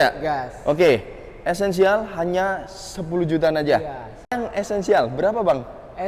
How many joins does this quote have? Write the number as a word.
one